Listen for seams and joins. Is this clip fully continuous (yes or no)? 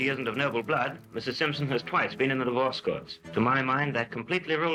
yes